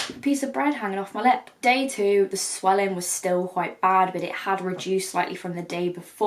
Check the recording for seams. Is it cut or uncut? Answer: uncut